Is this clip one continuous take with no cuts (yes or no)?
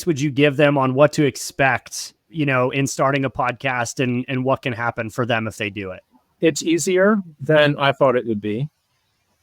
yes